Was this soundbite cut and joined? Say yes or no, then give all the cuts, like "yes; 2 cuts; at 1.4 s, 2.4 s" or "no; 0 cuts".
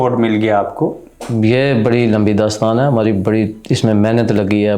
yes; 1 cut; at 1.2 s